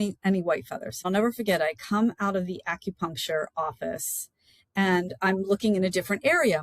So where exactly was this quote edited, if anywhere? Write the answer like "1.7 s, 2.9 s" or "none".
1.0 s